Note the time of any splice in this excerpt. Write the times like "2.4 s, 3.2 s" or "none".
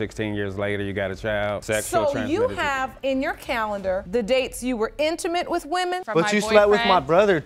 1.6 s, 6.0 s